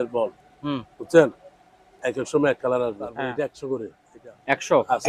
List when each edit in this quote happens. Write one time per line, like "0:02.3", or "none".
0:03.3